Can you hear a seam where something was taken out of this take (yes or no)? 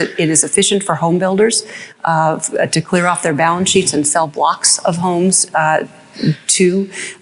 no